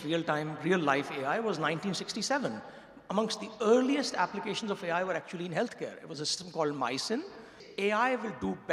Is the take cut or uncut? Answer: cut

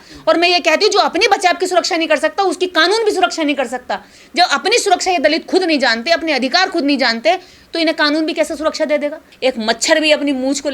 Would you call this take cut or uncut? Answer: cut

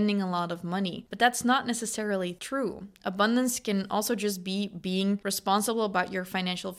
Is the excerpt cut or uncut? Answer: cut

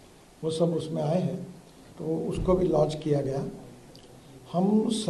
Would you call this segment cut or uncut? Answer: uncut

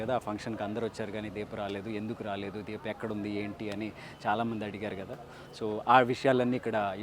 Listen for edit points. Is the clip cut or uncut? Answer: uncut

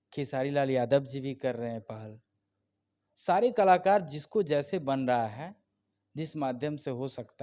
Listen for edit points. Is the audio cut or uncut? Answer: uncut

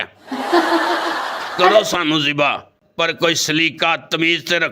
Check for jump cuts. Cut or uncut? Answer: cut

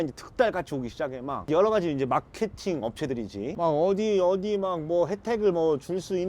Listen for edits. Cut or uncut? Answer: uncut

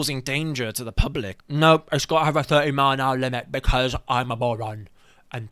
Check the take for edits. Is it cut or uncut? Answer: cut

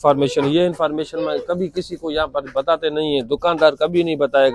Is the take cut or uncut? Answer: uncut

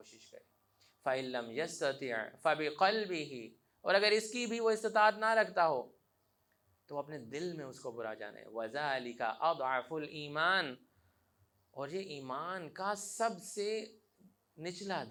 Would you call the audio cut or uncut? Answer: uncut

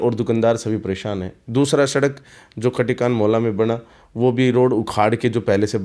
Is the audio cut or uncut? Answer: uncut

